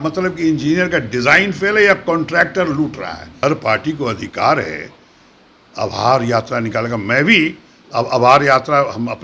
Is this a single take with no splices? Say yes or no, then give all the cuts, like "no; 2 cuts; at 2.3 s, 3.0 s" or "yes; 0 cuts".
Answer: no; 1 cut; at 3.3 s